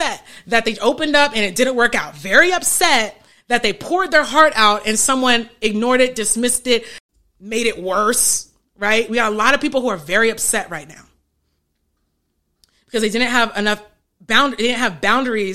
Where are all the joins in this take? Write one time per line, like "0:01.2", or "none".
0:07.0

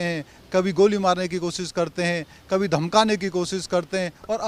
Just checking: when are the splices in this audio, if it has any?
none

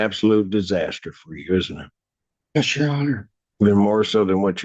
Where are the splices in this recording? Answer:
none

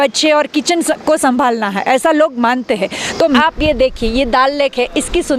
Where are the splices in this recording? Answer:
0:03.4

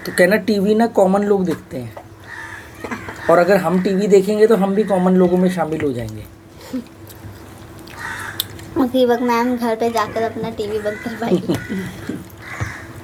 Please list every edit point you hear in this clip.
none

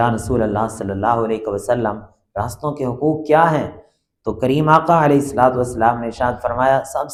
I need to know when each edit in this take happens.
none

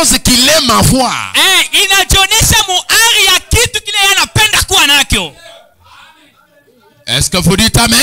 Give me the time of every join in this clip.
none

